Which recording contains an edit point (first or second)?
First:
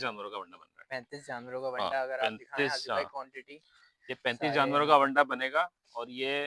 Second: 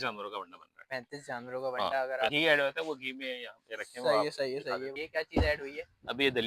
second